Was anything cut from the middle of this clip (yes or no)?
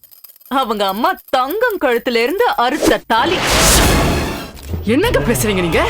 yes